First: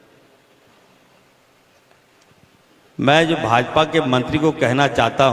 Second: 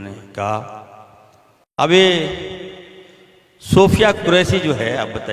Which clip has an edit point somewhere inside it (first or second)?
second